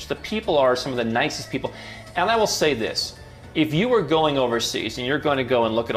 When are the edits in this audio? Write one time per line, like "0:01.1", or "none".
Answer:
none